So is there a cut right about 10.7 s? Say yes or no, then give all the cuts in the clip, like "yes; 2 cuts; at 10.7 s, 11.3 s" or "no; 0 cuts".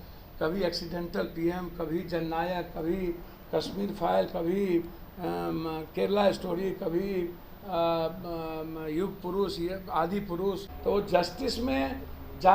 yes; 1 cut; at 10.7 s